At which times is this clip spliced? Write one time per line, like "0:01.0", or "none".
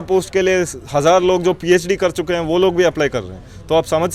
none